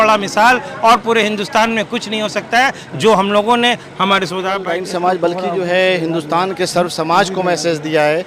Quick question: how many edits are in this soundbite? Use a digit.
1